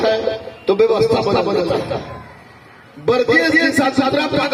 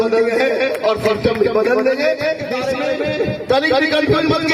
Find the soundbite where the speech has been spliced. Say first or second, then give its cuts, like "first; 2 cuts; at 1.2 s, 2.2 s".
second; 1 cut; at 2.5 s